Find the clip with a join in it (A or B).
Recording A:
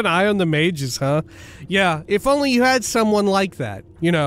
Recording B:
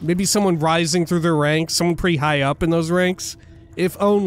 A